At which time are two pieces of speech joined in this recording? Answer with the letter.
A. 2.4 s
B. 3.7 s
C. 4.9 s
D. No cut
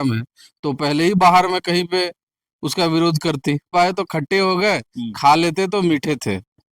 B